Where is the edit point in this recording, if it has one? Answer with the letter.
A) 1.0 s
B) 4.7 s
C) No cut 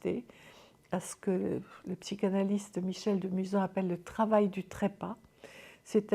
C